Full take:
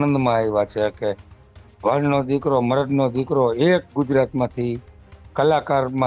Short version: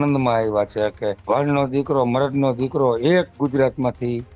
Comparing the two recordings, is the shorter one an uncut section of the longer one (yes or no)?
no